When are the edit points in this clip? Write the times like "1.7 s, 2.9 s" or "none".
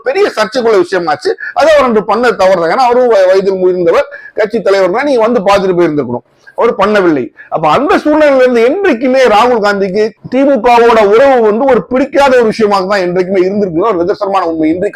none